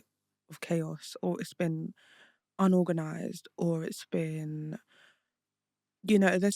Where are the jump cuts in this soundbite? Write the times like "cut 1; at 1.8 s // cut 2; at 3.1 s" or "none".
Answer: none